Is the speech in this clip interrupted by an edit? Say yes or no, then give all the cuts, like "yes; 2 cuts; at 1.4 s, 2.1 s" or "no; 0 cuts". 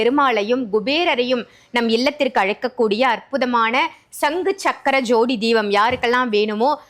no; 0 cuts